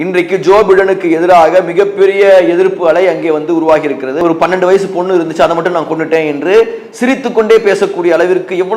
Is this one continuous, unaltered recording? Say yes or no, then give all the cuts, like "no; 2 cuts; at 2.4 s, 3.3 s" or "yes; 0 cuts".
no; 1 cut; at 4.2 s